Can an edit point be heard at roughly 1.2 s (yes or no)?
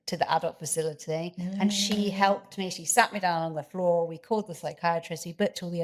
no